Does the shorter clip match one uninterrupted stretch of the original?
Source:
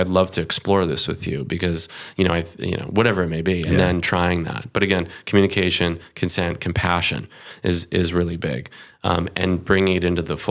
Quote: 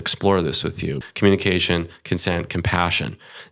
no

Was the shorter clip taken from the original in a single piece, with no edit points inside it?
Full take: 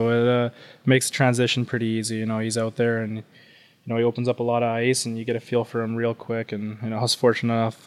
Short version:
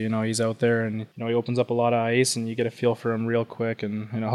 no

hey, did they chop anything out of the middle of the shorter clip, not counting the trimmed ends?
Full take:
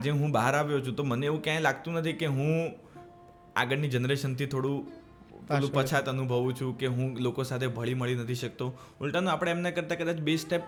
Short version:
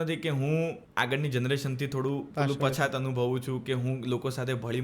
yes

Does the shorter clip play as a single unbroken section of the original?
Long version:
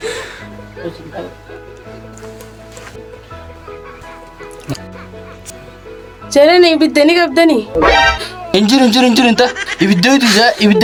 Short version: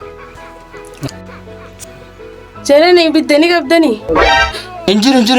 yes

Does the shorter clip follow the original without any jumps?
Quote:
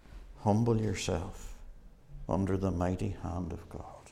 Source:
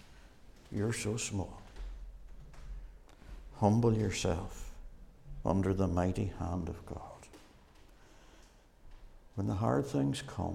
yes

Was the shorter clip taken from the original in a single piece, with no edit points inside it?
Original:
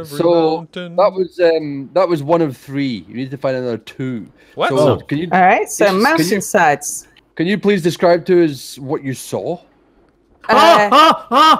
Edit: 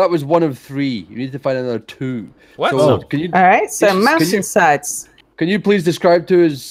yes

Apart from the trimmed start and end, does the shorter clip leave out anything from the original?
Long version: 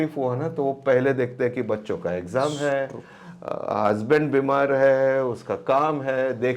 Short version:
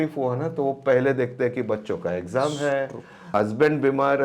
yes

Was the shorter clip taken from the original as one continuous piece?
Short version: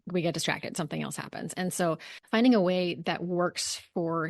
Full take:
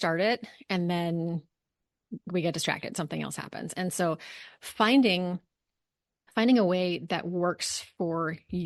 no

